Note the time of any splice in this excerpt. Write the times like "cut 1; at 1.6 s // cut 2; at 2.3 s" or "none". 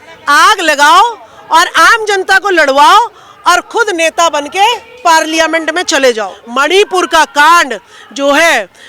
cut 1; at 6.4 s